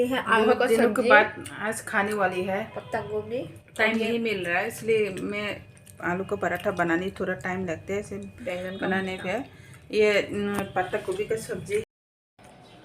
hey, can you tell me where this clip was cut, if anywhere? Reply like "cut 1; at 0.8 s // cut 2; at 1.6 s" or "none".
cut 1; at 11.8 s